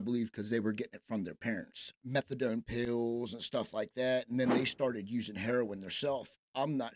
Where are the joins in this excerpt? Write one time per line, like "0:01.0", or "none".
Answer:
0:02.0